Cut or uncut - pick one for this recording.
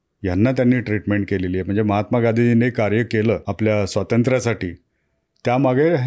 cut